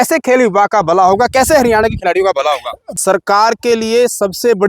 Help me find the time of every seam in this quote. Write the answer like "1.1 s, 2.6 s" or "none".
2.9 s